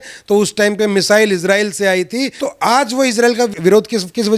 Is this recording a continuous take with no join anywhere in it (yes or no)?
no